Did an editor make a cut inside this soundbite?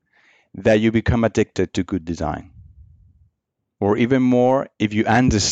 yes; 1 cut; at 3.6 s

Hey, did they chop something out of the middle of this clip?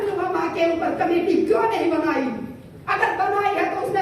no; 0 cuts

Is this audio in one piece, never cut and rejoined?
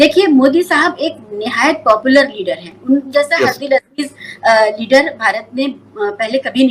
yes; 0 cuts

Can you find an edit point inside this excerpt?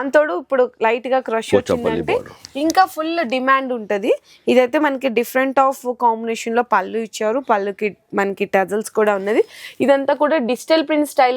no; 0 cuts

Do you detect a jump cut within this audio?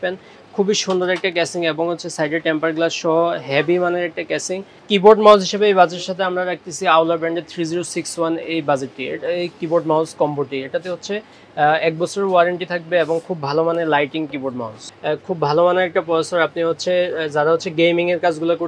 yes; 2 cuts; at 4.7 s, 14.9 s

